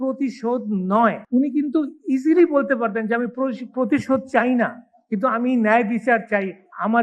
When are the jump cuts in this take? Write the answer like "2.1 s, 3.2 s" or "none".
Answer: 1.2 s